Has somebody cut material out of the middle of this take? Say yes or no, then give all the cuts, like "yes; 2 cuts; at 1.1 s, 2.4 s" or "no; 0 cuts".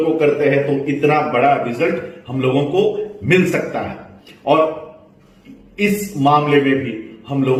no; 0 cuts